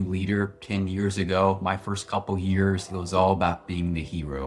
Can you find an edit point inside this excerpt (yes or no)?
no